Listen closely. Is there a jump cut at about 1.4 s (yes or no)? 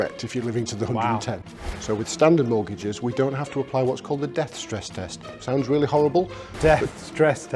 yes